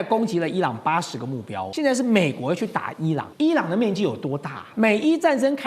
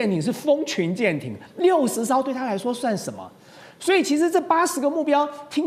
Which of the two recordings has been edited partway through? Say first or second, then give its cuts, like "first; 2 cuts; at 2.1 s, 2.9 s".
first; 3 cuts; at 1.6 s, 3.3 s, 4.6 s